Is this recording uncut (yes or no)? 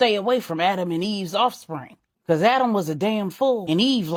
yes